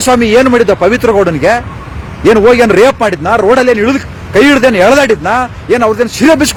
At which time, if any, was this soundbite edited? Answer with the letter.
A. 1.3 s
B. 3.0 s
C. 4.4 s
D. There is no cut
D